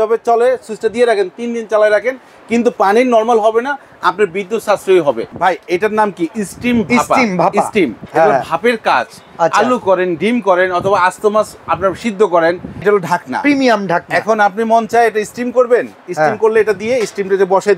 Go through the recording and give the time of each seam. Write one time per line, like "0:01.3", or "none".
0:05.4
0:12.8